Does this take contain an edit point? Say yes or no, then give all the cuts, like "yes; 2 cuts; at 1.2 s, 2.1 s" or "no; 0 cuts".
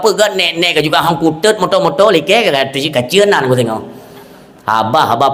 no; 0 cuts